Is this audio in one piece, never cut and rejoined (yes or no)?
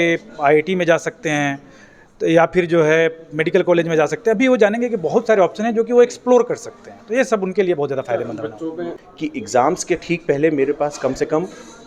no